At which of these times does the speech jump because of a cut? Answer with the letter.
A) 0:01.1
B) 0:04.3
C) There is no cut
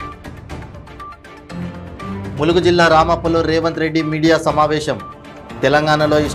C